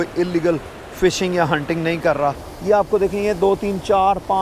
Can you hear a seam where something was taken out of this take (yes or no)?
yes